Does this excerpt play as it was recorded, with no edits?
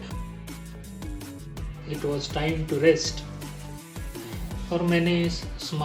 yes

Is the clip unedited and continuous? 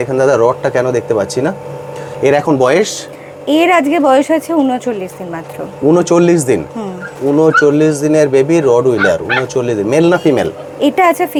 yes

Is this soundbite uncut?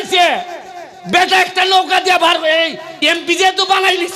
yes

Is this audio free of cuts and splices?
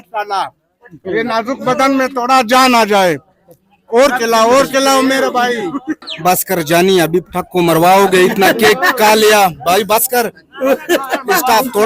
no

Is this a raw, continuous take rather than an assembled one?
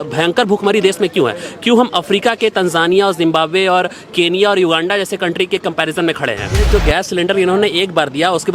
no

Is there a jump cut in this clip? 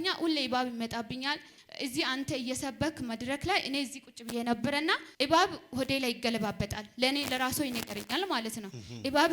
yes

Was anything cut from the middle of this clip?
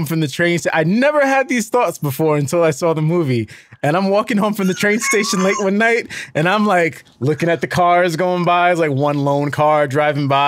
no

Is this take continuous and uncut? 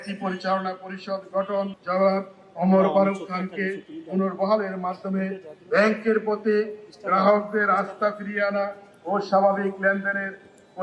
no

